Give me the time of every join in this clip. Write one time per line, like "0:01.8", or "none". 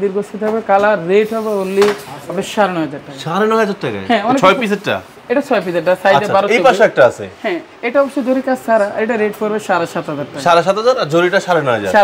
none